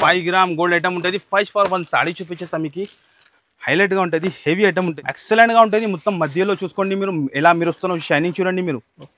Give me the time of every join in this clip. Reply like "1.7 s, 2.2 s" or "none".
4.9 s